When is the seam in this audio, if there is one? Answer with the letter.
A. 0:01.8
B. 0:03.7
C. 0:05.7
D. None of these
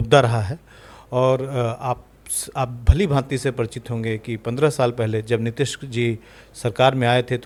D